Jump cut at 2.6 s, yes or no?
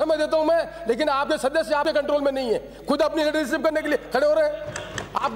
no